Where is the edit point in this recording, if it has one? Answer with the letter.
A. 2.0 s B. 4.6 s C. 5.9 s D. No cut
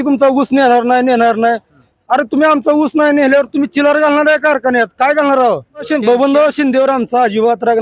C